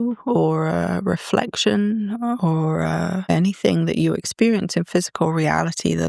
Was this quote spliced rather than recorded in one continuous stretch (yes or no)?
no